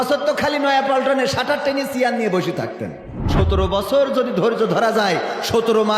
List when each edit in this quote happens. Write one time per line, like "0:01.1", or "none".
0:03.2